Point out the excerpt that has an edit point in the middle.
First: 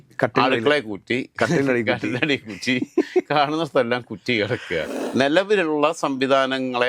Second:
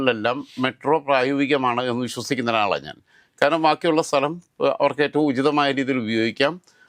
first; 1 cut; at 4.9 s

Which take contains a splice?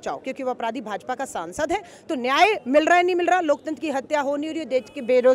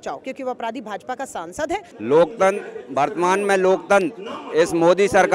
second; 1 cut; at 1.9 s

